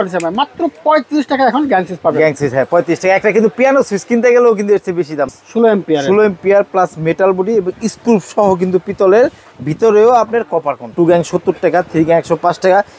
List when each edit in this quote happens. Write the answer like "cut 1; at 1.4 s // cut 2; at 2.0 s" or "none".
cut 1; at 5.3 s // cut 2; at 10.9 s